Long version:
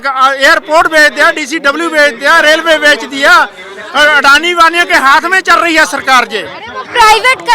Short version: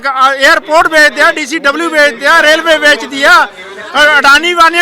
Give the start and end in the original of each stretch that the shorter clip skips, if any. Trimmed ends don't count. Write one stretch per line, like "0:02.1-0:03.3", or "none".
none